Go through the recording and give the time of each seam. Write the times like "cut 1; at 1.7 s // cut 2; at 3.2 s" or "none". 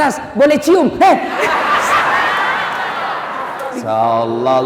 cut 1; at 3.7 s